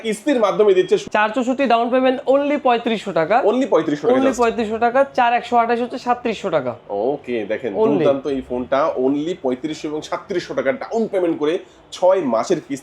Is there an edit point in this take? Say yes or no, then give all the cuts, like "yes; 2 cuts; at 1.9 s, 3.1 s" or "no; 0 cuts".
yes; 1 cut; at 1.1 s